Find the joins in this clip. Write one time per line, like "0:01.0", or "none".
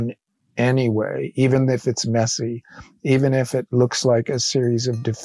none